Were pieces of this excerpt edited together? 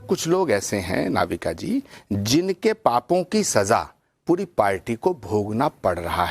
no; 0 cuts

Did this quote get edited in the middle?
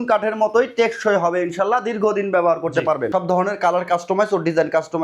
yes; 1 cut; at 3.1 s

